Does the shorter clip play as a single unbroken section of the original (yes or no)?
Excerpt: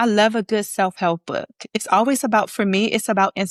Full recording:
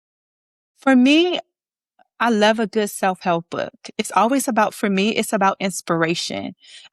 yes